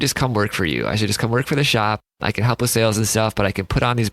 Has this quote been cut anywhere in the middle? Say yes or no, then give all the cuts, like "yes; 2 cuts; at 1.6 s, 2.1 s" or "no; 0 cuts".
yes; 1 cut; at 2.1 s